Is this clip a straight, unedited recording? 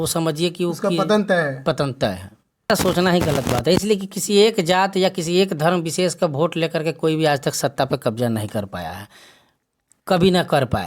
no; 1 cut; at 2.7 s

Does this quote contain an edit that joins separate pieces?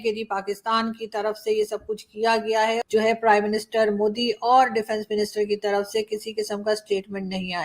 yes; 1 cut; at 2.8 s

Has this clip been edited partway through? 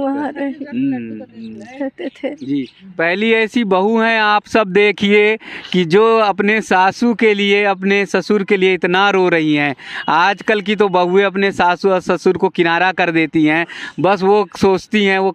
no; 0 cuts

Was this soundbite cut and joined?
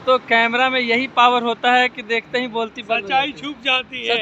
no; 0 cuts

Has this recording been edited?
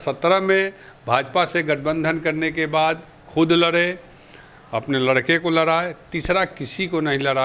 no; 0 cuts

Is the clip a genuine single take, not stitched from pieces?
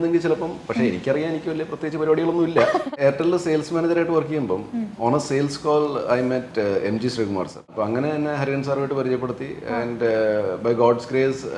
no; 2 cuts; at 2.9 s, 7.7 s

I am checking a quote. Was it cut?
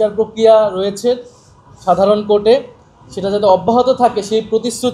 no; 0 cuts

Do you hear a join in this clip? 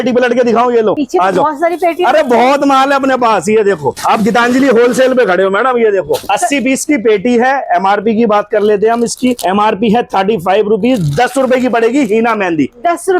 no; 0 cuts

